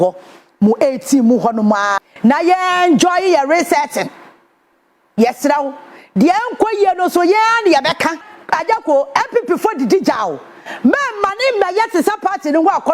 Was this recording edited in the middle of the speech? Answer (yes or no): yes